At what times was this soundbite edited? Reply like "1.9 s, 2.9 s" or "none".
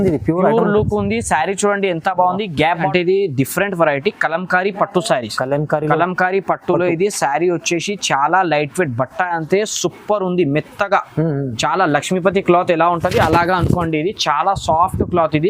2.8 s